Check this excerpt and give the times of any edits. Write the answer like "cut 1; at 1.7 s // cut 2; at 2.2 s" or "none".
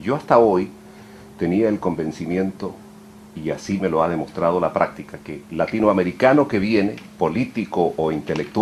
none

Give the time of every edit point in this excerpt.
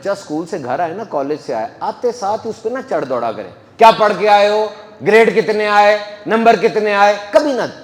none

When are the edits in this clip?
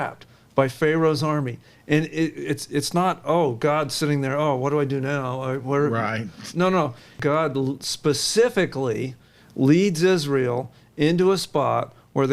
cut 1; at 7.1 s

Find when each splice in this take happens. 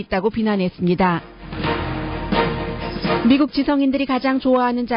none

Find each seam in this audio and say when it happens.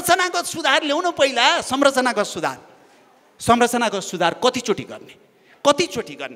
none

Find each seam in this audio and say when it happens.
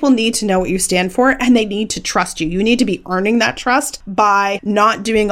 cut 1; at 4.4 s

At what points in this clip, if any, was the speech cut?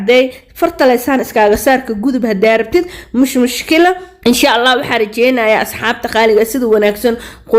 cut 1; at 4.1 s

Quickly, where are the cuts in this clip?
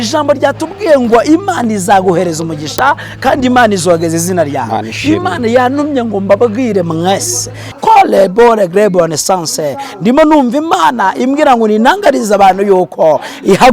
cut 1; at 7.8 s

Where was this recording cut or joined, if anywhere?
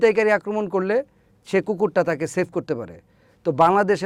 none

